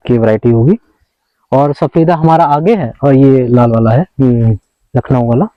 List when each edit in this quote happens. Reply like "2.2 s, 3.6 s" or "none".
none